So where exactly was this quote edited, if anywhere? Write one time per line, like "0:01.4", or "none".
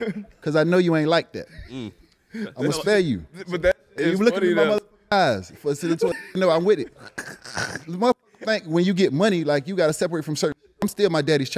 none